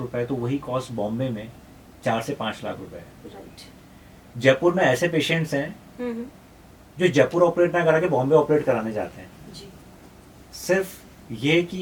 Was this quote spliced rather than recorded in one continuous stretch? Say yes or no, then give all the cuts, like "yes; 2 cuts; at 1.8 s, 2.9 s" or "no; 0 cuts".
no; 0 cuts